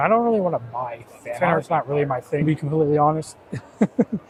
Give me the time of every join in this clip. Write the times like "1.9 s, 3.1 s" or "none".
none